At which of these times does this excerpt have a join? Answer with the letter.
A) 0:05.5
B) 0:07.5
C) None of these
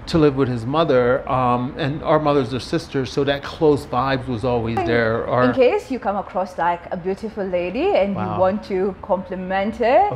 A